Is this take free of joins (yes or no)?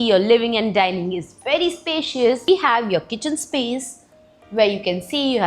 no